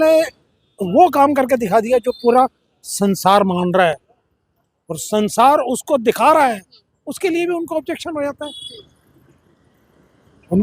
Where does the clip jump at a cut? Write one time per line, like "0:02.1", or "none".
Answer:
none